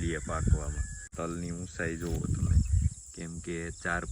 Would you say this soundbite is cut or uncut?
cut